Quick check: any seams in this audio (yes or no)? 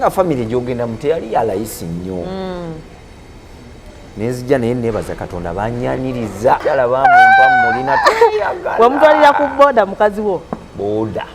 yes